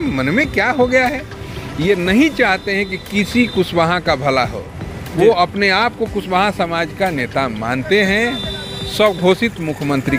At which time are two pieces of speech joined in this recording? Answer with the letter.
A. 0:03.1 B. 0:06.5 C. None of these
C